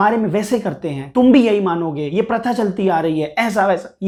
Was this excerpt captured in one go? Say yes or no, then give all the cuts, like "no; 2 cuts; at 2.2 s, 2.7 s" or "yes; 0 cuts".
yes; 0 cuts